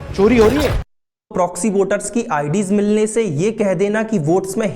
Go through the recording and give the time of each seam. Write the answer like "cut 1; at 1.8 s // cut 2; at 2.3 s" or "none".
cut 1; at 1.1 s